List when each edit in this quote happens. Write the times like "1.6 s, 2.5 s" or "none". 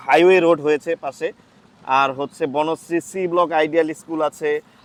none